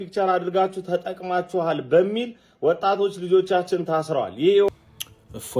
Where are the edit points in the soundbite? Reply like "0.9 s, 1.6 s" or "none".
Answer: 4.7 s